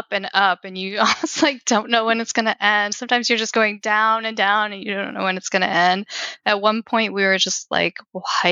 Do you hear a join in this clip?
no; 0 cuts

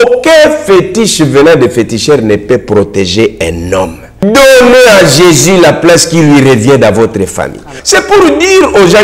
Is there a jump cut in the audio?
yes; 2 cuts; at 4.2 s, 7.7 s

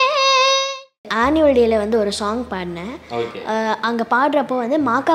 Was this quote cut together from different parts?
yes; 1 cut; at 1.1 s

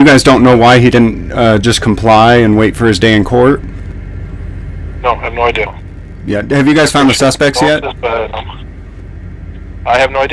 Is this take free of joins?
no; 1 cut; at 5.8 s

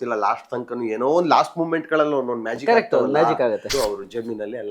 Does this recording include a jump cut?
yes; 1 cut; at 3.6 s

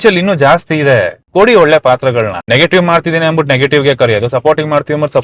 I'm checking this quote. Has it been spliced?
yes; 2 cuts; at 1.2 s, 2.4 s

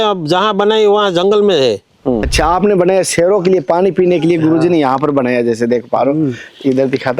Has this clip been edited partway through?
yes; 1 cut; at 2.3 s

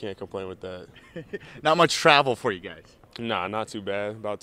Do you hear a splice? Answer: no; 0 cuts

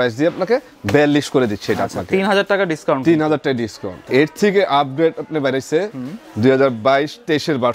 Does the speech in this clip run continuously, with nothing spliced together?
no; 1 cut; at 4.1 s

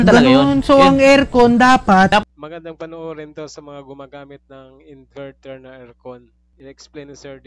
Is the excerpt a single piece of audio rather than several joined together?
no; 1 cut; at 2.2 s

